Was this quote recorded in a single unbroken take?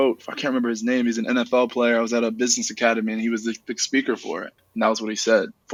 yes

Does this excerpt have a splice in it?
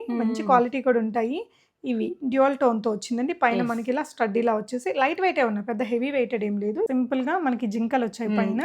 yes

